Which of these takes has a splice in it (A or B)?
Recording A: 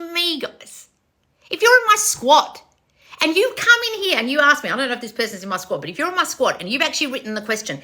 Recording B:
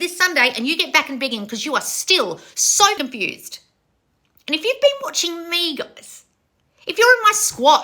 B